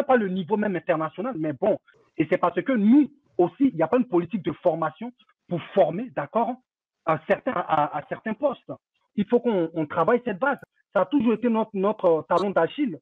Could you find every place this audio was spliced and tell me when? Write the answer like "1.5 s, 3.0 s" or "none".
1.9 s, 9.0 s, 10.6 s